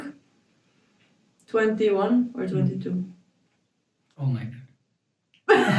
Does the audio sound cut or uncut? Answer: uncut